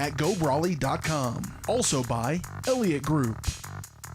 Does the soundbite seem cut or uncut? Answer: cut